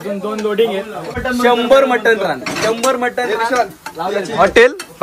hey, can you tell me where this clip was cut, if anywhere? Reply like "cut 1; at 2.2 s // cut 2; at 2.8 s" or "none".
cut 1; at 1.2 s